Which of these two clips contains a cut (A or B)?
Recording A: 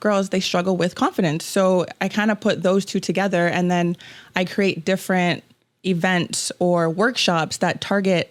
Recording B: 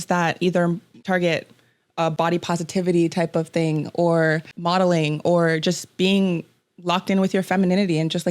B